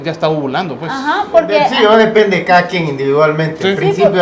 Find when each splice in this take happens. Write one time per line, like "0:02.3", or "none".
0:03.2